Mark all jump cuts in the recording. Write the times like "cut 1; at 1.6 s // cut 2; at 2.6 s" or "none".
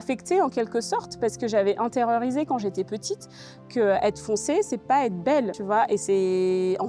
none